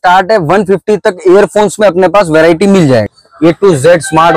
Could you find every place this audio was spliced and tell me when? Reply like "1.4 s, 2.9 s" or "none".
3.1 s